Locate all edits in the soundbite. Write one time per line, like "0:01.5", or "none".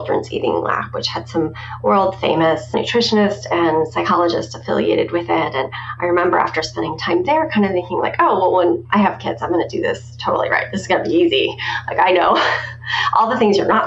0:02.7